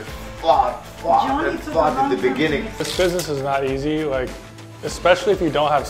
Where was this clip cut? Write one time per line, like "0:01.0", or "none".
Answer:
none

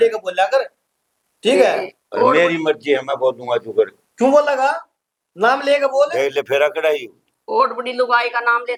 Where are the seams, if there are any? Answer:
none

